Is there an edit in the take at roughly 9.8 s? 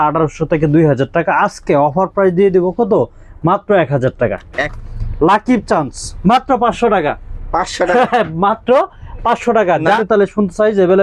yes; 2 cuts; at 4.6 s, 9.8 s

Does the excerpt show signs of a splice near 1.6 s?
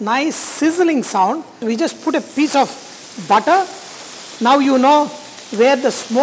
yes; 1 cut; at 1.6 s

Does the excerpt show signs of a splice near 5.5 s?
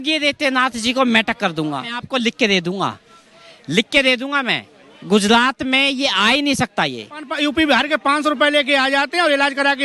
no; 2 cuts; at 2.0 s, 7.3 s

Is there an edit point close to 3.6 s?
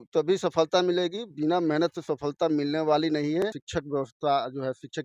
yes; 1 cut; at 3.6 s

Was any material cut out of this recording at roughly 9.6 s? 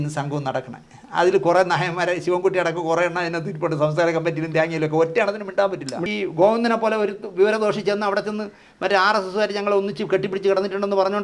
no; 1 cut; at 6.1 s

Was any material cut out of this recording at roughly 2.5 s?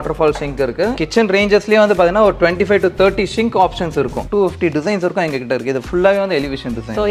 no; 2 cuts; at 1.0 s, 4.3 s

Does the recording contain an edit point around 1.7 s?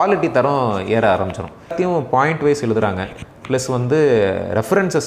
yes; 1 cut; at 1.7 s

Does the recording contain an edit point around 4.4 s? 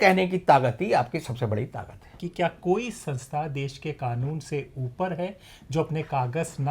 no; 1 cut; at 2.2 s

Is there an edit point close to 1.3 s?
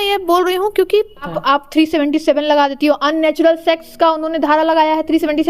yes; 1 cut; at 1.3 s

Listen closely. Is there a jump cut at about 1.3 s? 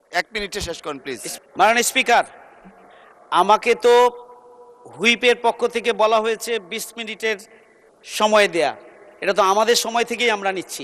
yes; 1 cut; at 1.3 s

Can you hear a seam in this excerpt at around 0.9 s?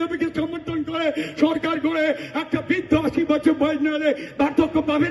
no; 0 cuts

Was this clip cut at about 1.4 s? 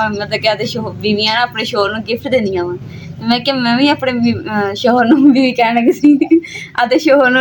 no; 0 cuts

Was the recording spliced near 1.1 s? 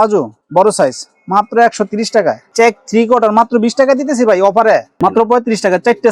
no; 2 cuts; at 2.4 s, 4.9 s

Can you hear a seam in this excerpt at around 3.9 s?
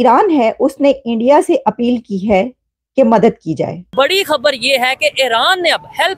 yes; 1 cut; at 3.9 s

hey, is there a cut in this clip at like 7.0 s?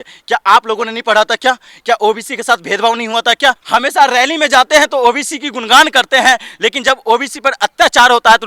no; 1 cut; at 3.6 s

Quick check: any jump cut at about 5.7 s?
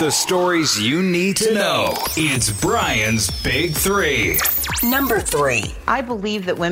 yes; 1 cut; at 5.7 s

